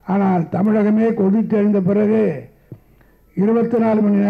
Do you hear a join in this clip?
no; 0 cuts

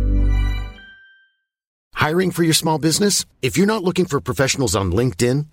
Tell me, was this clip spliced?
yes; 1 cut; at 1.8 s

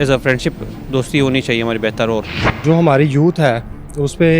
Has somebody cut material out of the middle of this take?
yes; 1 cut; at 2.6 s

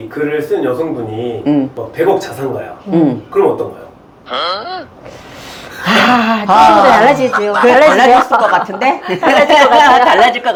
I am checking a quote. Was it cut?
no; 0 cuts

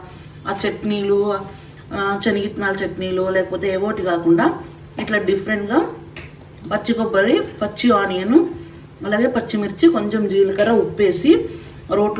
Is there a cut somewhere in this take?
no; 0 cuts

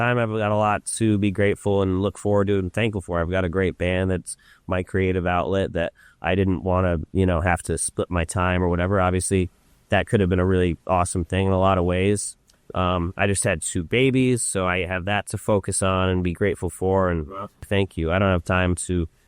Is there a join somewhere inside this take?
yes; 1 cut; at 17.6 s

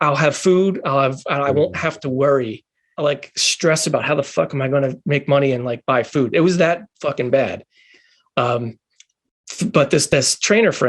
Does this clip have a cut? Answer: no; 0 cuts

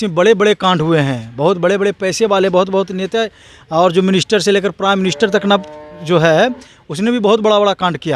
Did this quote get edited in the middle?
no; 0 cuts

